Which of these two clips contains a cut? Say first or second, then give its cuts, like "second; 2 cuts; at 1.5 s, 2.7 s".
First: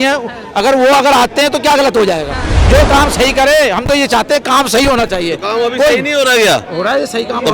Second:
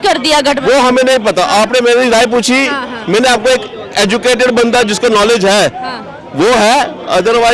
first; 1 cut; at 2.5 s